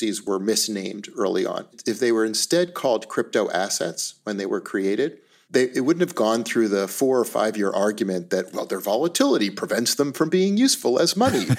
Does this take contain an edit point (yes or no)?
yes